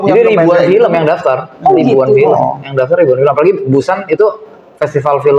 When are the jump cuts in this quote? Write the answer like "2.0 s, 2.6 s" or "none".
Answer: none